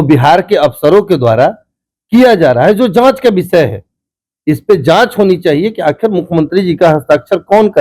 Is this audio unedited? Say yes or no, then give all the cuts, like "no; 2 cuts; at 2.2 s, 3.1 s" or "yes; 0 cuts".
yes; 0 cuts